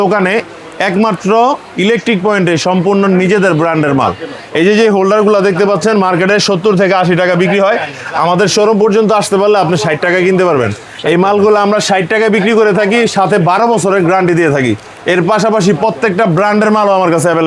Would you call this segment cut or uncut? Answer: uncut